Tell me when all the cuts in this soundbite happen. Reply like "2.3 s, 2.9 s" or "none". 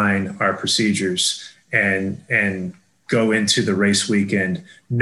none